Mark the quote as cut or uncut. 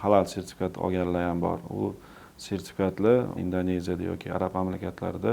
cut